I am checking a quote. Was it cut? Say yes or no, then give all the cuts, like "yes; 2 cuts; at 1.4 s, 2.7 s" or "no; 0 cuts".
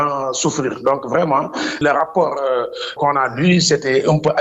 yes; 2 cuts; at 1.8 s, 3.0 s